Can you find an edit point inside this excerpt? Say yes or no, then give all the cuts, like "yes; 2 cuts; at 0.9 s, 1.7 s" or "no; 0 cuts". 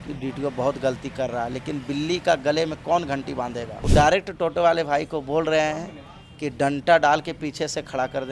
yes; 1 cut; at 3.7 s